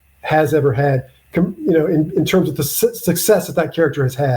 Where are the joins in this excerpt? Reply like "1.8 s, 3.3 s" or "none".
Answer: none